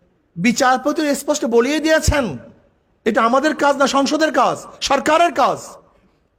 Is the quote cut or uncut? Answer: uncut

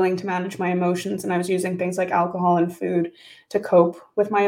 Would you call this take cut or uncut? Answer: uncut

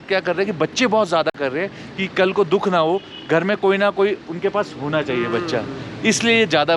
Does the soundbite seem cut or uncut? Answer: uncut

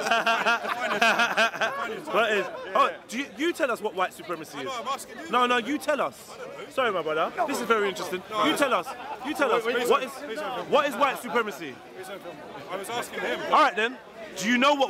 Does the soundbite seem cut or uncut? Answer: uncut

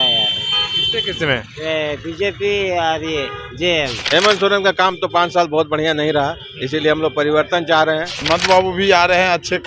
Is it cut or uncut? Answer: cut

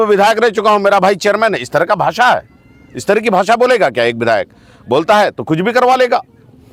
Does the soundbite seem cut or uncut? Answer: uncut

